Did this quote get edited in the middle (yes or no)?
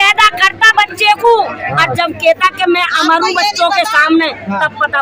no